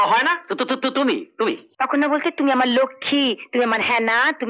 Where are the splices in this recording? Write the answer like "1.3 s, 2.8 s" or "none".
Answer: 1.7 s